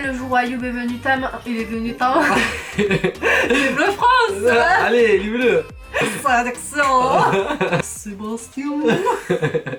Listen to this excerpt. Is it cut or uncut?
cut